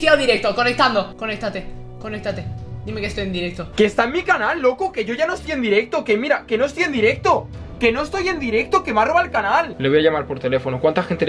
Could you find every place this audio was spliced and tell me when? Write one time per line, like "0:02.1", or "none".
0:03.7
0:09.7